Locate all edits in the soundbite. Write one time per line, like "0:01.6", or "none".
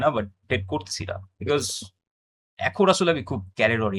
none